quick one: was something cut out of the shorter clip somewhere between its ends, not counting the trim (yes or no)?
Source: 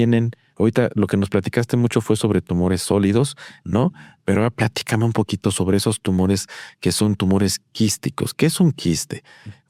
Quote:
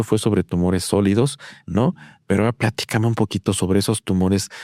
no